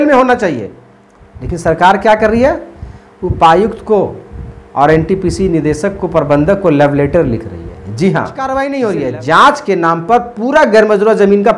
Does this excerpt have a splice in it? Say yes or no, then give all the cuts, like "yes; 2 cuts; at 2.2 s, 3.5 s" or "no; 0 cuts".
yes; 1 cut; at 8.4 s